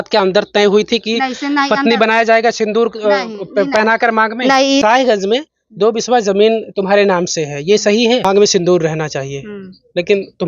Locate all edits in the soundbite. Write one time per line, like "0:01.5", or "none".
0:04.8
0:08.2